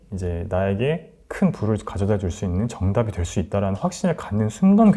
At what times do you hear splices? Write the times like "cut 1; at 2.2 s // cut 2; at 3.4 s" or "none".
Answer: none